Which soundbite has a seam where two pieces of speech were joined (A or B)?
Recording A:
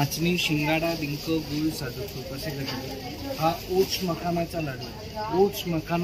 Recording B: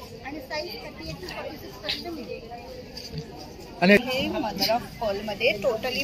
B